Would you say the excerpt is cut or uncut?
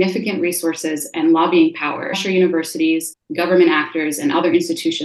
cut